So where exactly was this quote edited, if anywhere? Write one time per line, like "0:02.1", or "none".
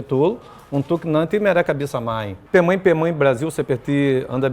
0:02.3